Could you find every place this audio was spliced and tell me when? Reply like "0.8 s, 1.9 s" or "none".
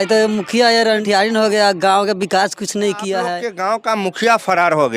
3.5 s